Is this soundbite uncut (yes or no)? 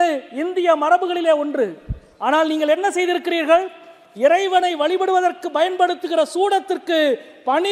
yes